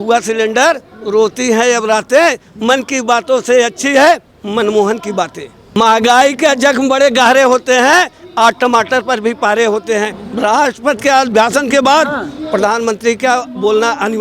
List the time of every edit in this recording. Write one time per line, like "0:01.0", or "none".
0:05.8
0:10.2